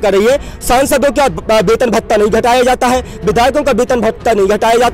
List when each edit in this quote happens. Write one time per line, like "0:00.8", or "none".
none